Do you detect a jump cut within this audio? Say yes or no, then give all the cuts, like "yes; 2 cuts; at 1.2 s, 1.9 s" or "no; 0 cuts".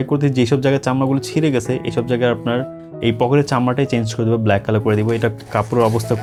no; 0 cuts